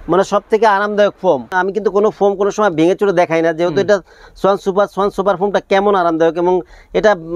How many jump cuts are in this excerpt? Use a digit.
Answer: 0